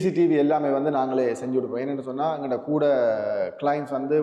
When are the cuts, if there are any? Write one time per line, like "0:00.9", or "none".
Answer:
none